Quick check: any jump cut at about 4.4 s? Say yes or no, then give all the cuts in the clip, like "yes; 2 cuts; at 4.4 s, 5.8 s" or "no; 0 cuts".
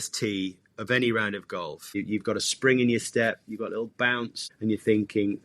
yes; 2 cuts; at 2.0 s, 4.4 s